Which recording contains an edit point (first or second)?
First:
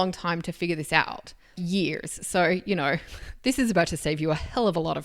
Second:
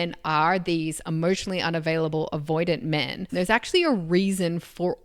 second